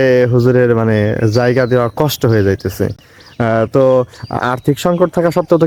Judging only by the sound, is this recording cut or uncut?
uncut